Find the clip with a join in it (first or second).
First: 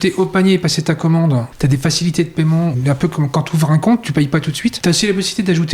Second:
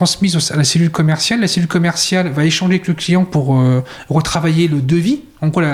first